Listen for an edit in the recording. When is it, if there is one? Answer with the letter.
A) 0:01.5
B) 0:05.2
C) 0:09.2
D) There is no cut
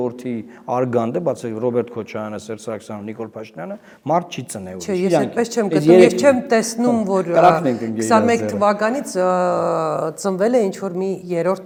D